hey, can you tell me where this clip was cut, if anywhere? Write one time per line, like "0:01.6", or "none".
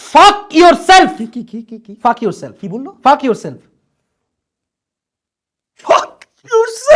none